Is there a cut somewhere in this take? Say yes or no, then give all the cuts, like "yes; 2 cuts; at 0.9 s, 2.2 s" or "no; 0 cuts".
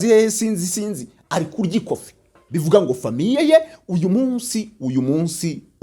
yes; 1 cut; at 2.4 s